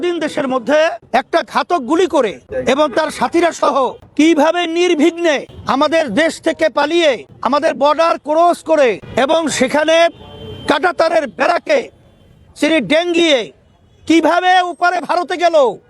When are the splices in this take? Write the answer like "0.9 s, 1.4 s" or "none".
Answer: 1.0 s, 2.5 s, 4.0 s, 5.5 s, 7.3 s, 9.0 s